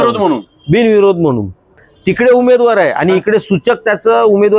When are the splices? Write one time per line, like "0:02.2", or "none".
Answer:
0:01.8